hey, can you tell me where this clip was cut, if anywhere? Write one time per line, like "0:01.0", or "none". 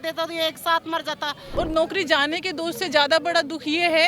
0:01.4

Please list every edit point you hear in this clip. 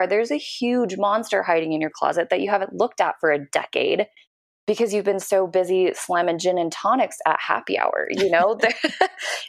none

